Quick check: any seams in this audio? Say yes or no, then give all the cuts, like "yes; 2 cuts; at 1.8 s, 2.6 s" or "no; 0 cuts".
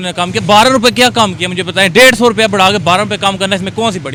no; 0 cuts